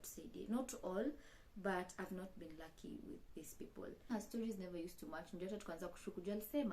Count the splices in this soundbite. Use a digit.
1